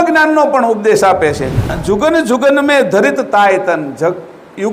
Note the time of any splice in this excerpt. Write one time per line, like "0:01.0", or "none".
0:01.8